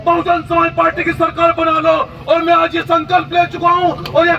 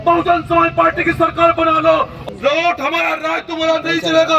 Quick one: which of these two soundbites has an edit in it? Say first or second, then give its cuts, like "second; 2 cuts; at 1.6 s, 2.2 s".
second; 1 cut; at 2.2 s